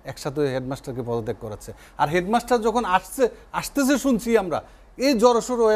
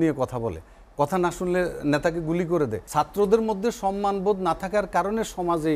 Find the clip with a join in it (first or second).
second